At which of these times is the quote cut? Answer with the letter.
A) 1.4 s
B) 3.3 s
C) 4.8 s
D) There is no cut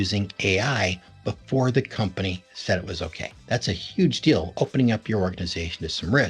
B